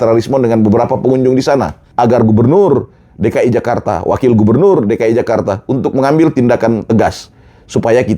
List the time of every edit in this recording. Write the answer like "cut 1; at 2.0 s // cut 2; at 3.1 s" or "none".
cut 1; at 1.8 s